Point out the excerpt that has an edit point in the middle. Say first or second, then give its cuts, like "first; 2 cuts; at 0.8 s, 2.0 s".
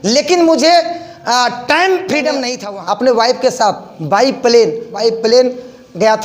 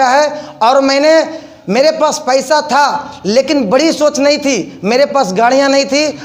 first; 2 cuts; at 2.6 s, 4.9 s